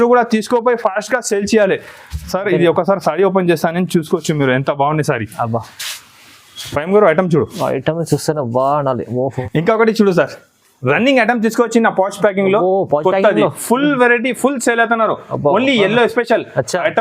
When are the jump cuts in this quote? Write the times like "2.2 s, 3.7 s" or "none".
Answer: 9.4 s